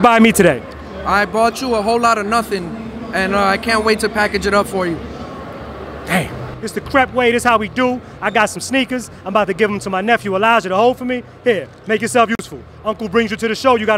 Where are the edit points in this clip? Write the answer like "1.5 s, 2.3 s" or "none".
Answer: 6.4 s